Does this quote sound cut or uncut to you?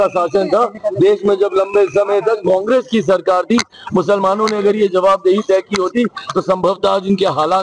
uncut